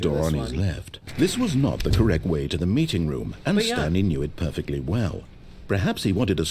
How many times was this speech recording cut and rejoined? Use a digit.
1